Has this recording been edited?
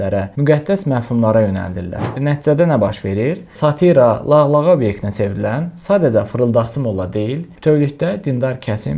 yes; 1 cut; at 2.0 s

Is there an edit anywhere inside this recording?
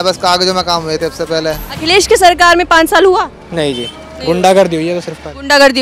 yes; 1 cut; at 1.7 s

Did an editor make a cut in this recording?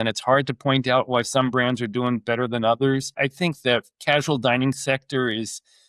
yes; 1 cut; at 3.2 s

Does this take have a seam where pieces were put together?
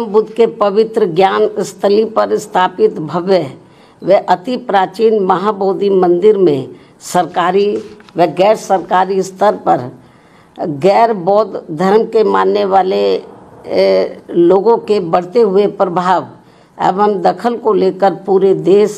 no; 0 cuts

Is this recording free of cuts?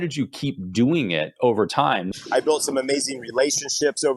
no; 1 cut; at 2.1 s

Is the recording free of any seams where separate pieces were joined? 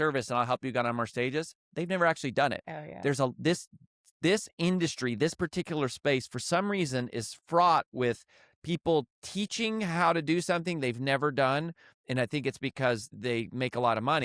no; 1 cut; at 13.1 s

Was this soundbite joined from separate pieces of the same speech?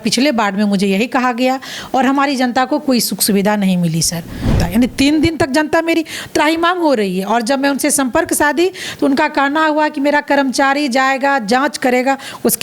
yes; 1 cut; at 4.5 s

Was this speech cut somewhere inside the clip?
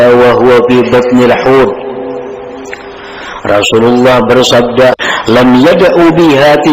yes; 1 cut; at 5.0 s

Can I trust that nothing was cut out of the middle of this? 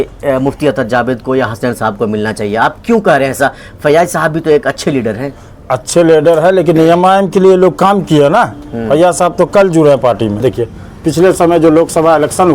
no; 1 cut; at 10.8 s

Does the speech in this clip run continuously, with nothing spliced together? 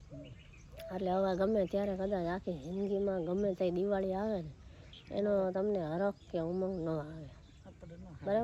yes; 0 cuts

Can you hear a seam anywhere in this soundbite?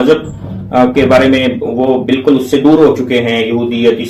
no; 0 cuts

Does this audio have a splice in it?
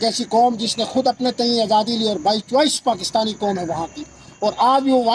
no; 0 cuts

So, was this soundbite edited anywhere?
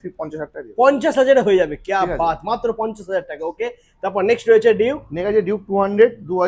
no; 0 cuts

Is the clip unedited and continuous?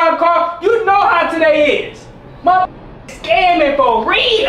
yes; 0 cuts

